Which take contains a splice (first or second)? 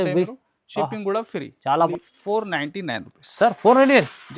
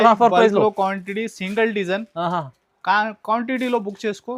first